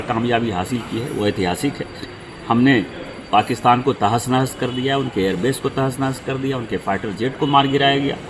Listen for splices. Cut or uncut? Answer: uncut